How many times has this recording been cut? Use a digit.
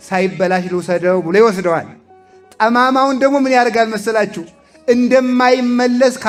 0